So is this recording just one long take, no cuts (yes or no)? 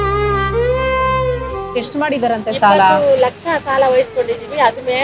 no